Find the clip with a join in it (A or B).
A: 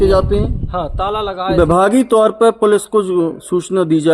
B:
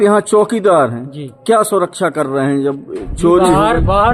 A